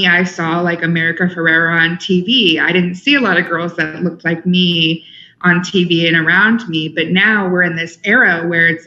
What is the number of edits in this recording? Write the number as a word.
zero